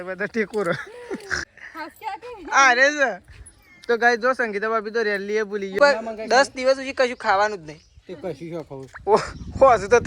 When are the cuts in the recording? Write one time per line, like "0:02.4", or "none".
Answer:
0:01.4
0:05.8